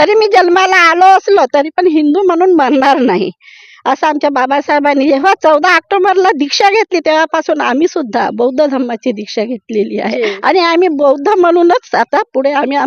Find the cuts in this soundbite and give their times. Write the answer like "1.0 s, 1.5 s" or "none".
none